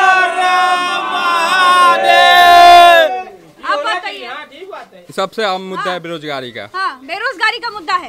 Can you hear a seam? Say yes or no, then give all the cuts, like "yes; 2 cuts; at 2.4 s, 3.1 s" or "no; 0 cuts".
no; 0 cuts